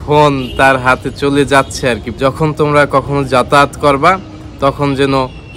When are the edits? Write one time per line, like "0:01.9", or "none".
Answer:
0:02.1